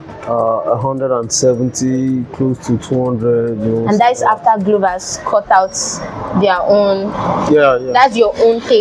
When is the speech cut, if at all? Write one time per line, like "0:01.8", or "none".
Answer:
none